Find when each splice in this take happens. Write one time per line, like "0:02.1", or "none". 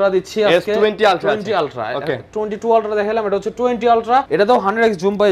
0:04.3